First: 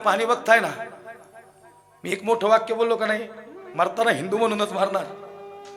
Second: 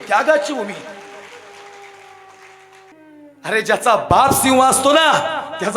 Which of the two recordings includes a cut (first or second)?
second